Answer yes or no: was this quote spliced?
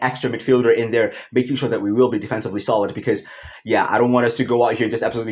no